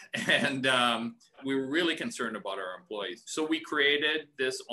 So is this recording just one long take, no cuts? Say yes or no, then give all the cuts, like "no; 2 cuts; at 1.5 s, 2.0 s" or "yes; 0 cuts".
no; 2 cuts; at 1.4 s, 3.2 s